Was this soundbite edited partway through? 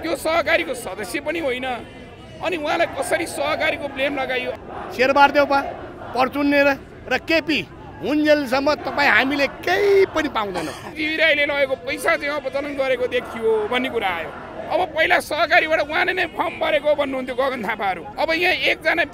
yes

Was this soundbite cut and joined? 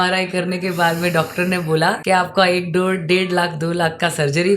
yes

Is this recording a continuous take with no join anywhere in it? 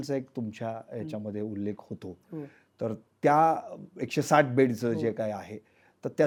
yes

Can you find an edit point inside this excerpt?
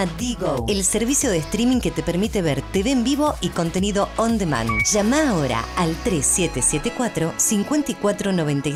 no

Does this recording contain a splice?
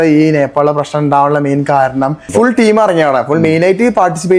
yes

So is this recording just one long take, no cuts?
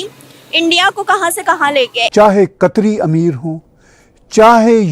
no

